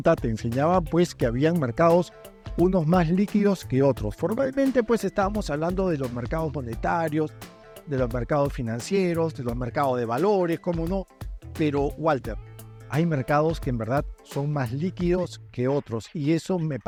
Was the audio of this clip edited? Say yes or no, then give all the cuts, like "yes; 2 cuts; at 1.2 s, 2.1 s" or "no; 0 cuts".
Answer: no; 0 cuts